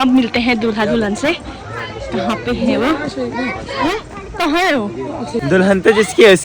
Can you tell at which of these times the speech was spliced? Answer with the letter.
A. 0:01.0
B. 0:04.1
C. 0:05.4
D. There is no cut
C